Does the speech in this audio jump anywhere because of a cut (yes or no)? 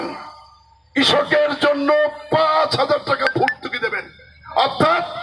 no